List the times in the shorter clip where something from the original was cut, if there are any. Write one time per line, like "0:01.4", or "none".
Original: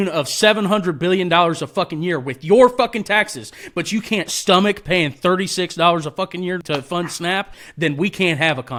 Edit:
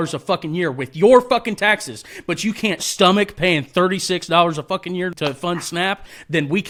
none